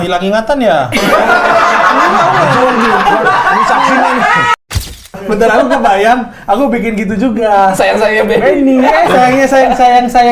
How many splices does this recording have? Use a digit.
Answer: 1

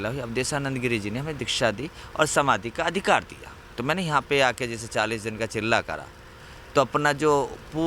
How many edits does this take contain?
1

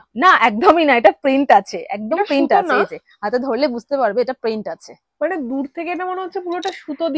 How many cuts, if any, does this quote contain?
0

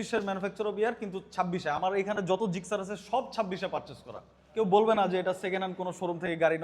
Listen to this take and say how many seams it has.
1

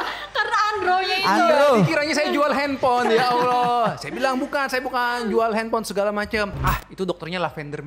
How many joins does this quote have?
1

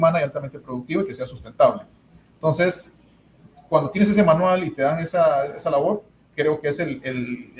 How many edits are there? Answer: 0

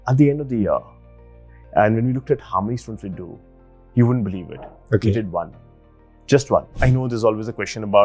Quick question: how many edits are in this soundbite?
1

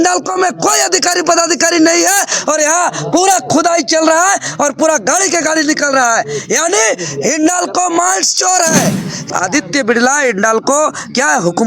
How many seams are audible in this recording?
1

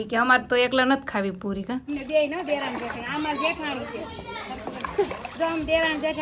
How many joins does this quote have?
1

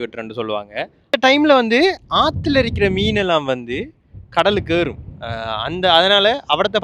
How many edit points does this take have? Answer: 1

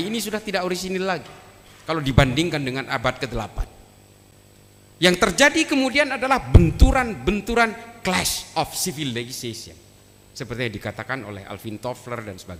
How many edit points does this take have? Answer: 0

